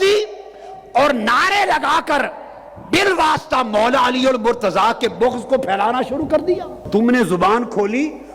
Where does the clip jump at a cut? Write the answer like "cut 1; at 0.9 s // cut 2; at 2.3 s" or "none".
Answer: cut 1; at 6.9 s

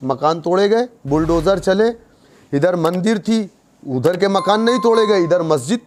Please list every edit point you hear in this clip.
none

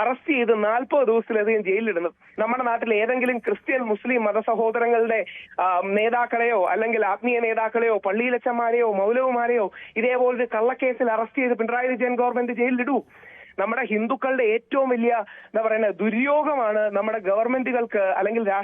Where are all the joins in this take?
cut 1; at 2.2 s

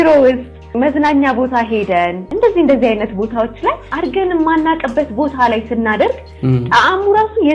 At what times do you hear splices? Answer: cut 1; at 0.7 s // cut 2; at 2.2 s // cut 3; at 3.9 s

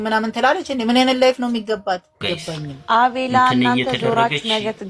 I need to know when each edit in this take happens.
cut 1; at 2.3 s

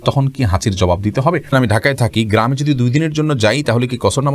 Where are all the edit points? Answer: cut 1; at 1.5 s

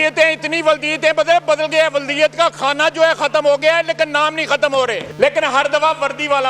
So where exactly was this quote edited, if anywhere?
cut 1; at 5.1 s

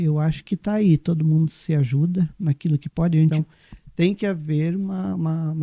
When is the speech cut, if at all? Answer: cut 1; at 3.3 s

